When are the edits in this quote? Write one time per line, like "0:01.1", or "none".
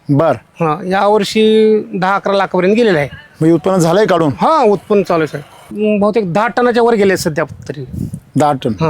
0:05.7